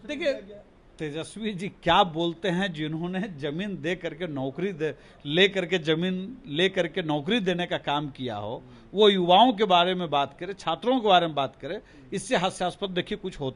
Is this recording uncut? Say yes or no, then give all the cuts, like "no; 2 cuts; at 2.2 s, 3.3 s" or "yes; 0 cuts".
yes; 0 cuts